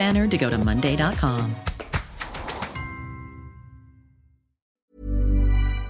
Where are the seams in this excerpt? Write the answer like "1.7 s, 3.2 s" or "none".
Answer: 4.8 s